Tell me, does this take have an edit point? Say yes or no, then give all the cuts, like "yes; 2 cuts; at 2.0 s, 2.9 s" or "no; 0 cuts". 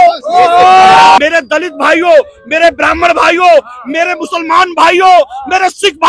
yes; 1 cut; at 1.2 s